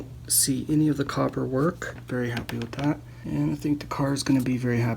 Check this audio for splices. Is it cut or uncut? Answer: cut